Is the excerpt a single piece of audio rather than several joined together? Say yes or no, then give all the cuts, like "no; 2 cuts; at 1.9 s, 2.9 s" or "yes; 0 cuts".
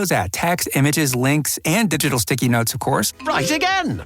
no; 1 cut; at 3.1 s